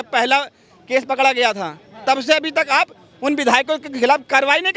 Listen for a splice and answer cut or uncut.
uncut